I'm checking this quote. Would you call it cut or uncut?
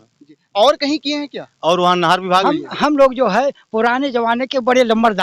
cut